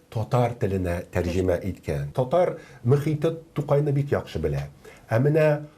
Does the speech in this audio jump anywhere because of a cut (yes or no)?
yes